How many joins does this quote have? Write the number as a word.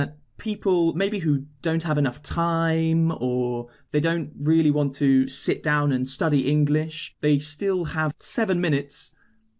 two